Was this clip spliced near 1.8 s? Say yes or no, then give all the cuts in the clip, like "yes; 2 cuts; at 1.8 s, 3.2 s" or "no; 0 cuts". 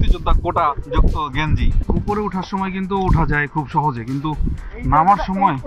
yes; 1 cut; at 1.8 s